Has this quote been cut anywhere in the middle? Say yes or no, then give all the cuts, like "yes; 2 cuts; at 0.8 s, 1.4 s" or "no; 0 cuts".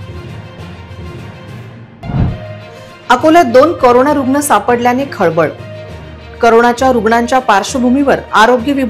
yes; 1 cut; at 1.2 s